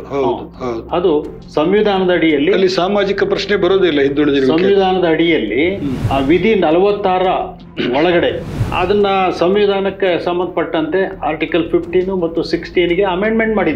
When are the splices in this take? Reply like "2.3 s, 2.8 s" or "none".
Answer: 5.9 s, 8.5 s